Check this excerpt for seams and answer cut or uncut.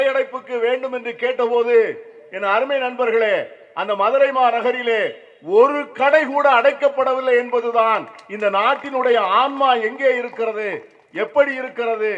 uncut